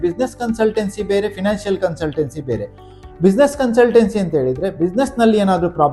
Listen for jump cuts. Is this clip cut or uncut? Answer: uncut